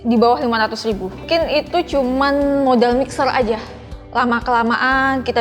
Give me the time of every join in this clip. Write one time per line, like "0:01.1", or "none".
0:01.2
0:03.8